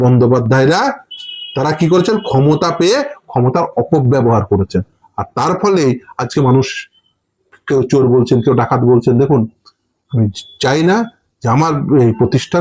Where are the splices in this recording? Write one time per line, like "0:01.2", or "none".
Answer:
none